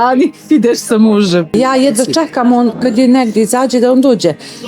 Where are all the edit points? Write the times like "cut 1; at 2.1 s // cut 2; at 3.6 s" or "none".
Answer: cut 1; at 1.5 s